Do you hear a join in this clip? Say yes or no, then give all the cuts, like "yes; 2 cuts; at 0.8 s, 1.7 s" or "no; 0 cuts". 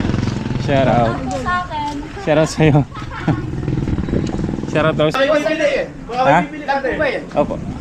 yes; 1 cut; at 5.2 s